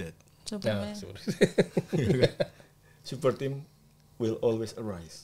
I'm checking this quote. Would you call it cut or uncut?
uncut